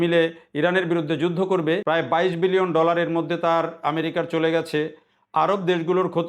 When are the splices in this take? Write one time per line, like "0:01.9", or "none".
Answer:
0:01.8

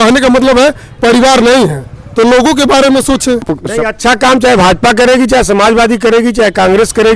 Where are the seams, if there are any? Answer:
0:03.6

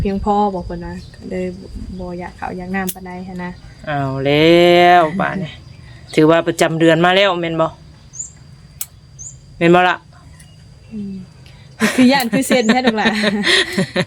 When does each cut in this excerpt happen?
none

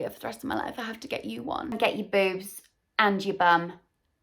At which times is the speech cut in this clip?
0:01.8

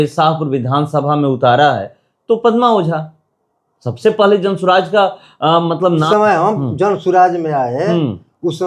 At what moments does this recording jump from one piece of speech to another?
0:06.1

